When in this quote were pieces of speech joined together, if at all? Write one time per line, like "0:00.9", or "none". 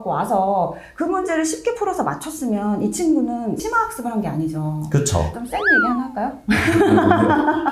0:05.3